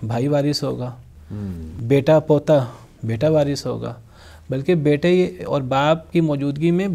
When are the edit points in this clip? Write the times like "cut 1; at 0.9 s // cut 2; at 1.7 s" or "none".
none